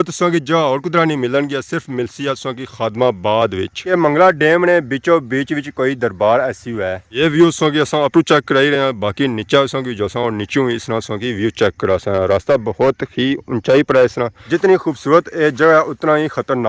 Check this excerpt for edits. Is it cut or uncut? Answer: cut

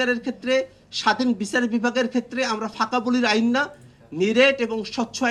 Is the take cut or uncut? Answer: uncut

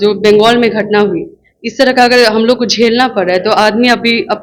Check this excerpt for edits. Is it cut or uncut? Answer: uncut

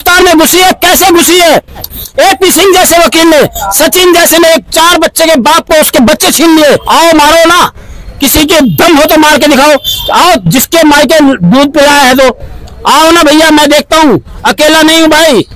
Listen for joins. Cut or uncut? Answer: cut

